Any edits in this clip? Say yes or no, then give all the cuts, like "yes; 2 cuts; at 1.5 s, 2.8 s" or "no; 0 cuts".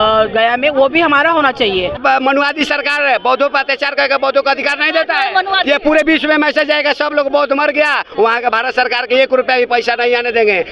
yes; 1 cut; at 2.0 s